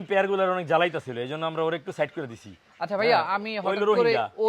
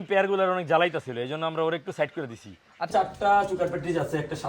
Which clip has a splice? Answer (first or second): second